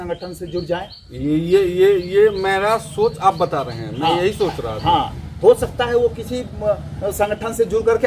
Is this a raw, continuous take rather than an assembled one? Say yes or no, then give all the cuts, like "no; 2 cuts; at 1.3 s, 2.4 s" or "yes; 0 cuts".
yes; 0 cuts